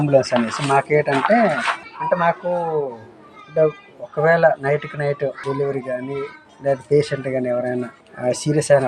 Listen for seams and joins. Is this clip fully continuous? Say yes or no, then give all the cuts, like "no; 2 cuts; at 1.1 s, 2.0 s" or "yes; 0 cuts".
no; 3 cuts; at 1.7 s, 5.4 s, 8.0 s